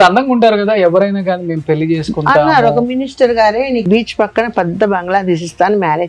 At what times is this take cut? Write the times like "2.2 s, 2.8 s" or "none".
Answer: 3.9 s